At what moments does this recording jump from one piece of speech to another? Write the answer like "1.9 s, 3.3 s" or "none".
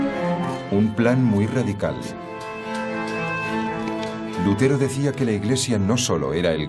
5.3 s